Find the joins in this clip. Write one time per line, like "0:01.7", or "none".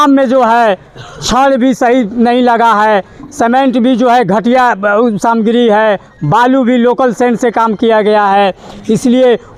none

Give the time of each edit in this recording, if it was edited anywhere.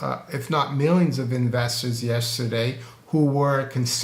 none

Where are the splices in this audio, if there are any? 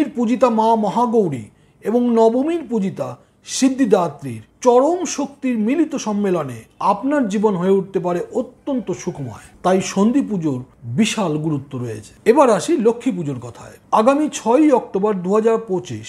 none

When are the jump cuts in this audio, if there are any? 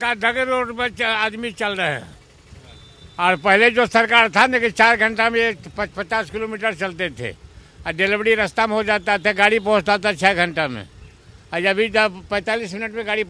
none

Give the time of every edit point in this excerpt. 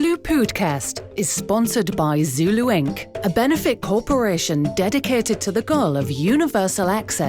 none

